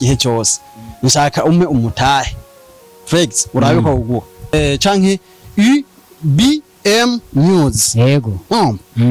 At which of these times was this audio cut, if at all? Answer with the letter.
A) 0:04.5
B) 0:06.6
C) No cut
A